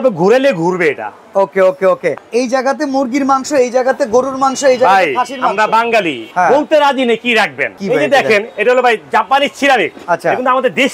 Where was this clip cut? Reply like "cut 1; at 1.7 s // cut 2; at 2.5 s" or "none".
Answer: cut 1; at 2.2 s // cut 2; at 6.2 s // cut 3; at 7.7 s // cut 4; at 10.0 s